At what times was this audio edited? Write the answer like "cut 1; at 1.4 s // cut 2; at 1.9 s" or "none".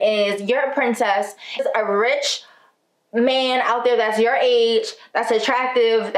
cut 1; at 1.6 s